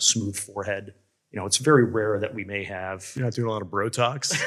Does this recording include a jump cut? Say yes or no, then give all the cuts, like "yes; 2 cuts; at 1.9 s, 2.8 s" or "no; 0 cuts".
no; 0 cuts